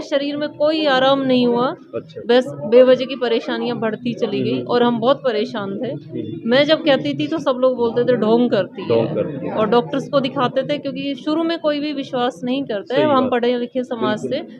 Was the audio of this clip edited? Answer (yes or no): no